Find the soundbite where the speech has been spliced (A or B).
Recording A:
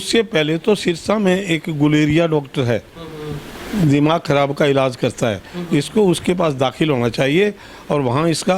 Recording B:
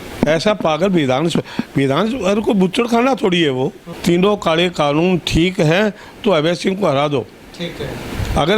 B